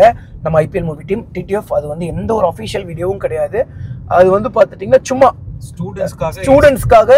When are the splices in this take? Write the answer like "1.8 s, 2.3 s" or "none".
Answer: none